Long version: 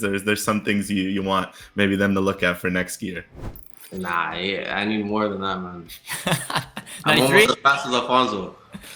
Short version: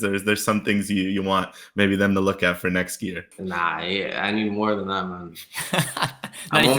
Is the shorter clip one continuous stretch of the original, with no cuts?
no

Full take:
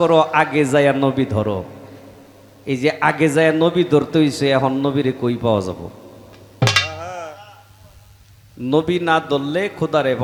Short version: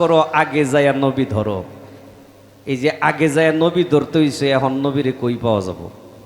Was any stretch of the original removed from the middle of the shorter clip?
no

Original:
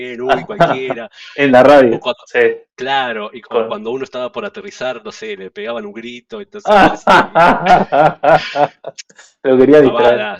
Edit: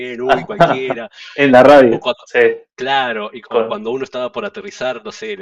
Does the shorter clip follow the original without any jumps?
yes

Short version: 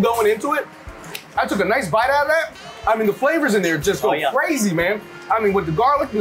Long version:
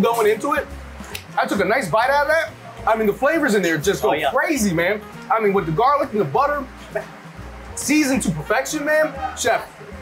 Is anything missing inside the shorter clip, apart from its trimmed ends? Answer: no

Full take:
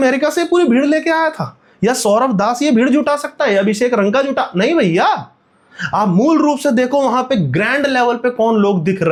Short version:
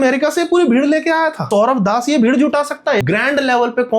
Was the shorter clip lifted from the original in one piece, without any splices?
no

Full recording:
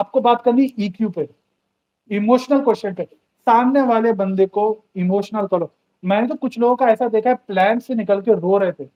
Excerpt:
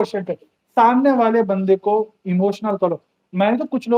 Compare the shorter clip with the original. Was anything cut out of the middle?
no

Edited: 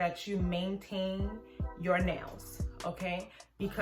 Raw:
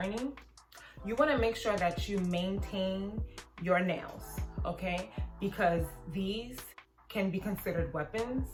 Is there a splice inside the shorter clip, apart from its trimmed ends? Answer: no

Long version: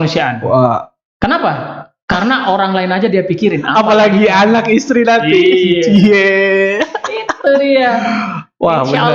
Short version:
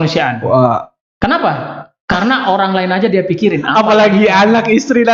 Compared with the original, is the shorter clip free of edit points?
yes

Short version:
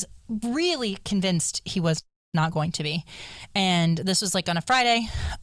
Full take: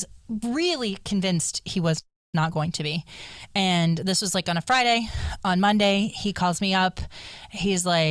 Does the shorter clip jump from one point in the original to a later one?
no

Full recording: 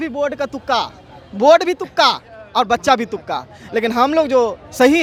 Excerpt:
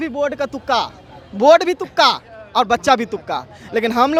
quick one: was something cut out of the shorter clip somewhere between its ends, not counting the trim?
no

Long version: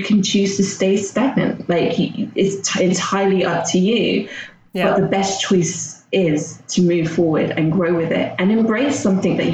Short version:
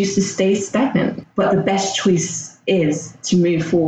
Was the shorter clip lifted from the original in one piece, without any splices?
no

